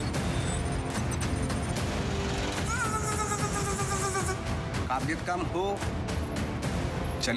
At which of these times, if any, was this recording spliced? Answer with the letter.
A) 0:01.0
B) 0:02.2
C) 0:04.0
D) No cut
B